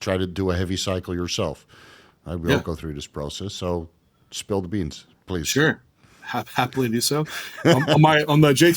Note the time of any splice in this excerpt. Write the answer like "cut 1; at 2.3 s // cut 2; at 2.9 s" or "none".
none